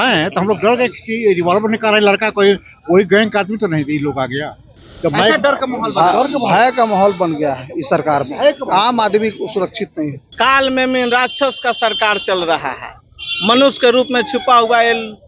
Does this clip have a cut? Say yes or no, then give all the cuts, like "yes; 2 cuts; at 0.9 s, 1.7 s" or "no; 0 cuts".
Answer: yes; 1 cut; at 10.2 s